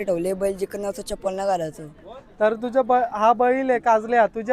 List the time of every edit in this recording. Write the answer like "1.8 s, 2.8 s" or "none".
none